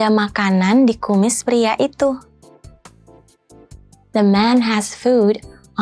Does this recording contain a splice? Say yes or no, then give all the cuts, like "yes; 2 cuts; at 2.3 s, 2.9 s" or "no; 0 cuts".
yes; 2 cuts; at 2.3 s, 3.8 s